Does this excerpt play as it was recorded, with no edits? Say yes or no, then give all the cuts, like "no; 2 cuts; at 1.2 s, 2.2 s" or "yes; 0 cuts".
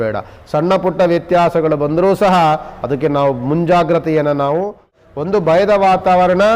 no; 1 cut; at 4.9 s